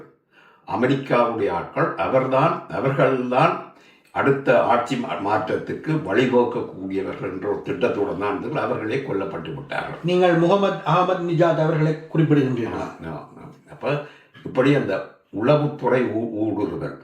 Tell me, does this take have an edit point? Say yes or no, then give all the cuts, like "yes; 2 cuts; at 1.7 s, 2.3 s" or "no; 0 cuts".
no; 0 cuts